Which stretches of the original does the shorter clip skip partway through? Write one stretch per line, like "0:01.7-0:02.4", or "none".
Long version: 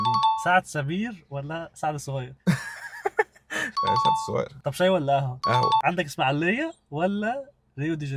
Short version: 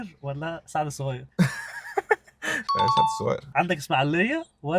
0:04.6-0:05.8